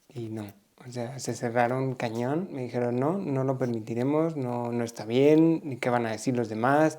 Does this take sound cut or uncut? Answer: cut